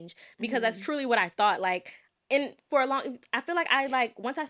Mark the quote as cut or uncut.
uncut